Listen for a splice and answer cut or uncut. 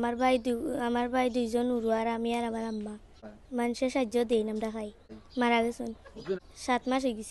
cut